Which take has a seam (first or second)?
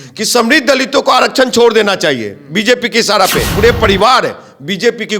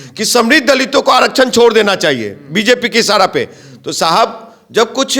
first